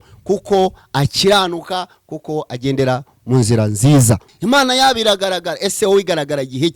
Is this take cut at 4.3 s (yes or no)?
yes